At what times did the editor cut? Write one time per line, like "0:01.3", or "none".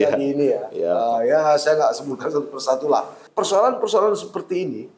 0:03.2